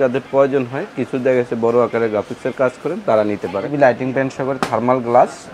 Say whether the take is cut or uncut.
cut